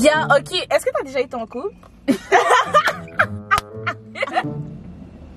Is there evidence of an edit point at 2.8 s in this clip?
no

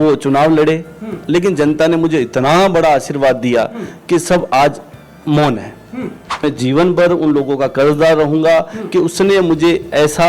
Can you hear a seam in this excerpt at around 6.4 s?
yes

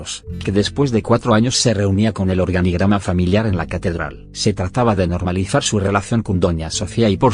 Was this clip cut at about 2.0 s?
yes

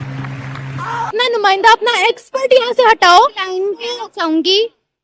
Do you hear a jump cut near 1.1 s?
yes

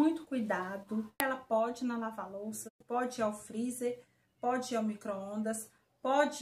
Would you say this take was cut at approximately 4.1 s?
no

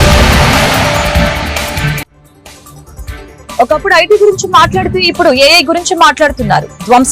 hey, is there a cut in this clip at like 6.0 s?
no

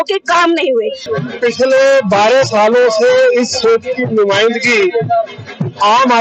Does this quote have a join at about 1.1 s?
yes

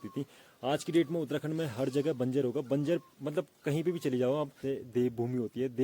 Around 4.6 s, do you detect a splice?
yes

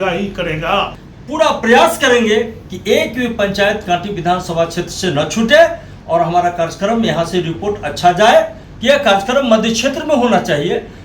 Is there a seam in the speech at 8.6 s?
yes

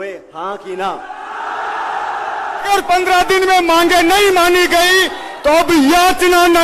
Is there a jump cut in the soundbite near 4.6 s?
no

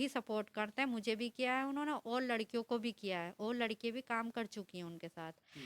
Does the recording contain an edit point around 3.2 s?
no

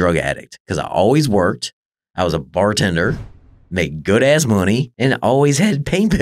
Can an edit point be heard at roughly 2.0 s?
no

